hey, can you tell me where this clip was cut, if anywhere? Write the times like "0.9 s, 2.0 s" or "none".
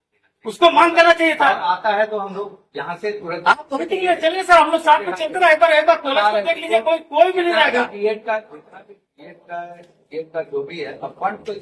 none